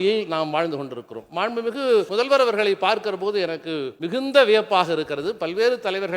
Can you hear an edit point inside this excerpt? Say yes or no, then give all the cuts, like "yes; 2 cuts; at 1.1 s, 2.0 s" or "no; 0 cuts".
yes; 2 cuts; at 2.1 s, 3.9 s